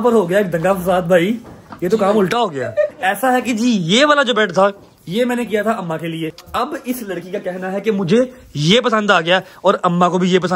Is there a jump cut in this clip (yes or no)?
yes